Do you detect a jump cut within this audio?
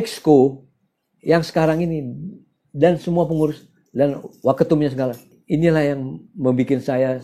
yes; 1 cut; at 5.3 s

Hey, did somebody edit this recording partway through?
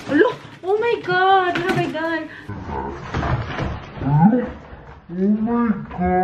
yes; 1 cut; at 2.1 s

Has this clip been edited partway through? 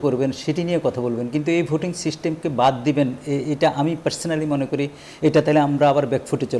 no; 0 cuts

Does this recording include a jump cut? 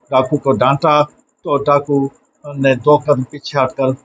no; 0 cuts

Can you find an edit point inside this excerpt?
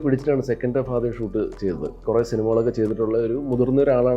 yes; 1 cut; at 2.0 s

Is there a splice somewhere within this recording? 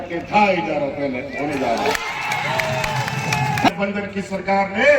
yes; 1 cut; at 3.7 s

